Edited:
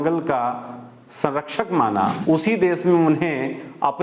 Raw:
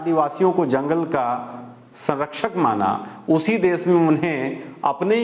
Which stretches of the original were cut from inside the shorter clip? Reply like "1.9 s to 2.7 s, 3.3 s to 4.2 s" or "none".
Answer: 3.0 s to 3.2 s